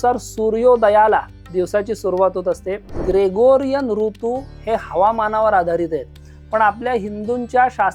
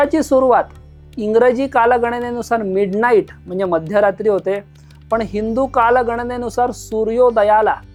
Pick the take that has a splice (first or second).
first